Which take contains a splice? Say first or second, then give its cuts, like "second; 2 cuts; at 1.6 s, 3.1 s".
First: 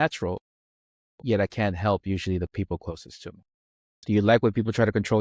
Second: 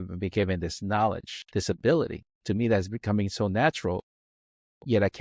first; 1 cut; at 3.5 s